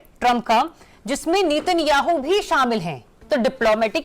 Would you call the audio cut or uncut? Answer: cut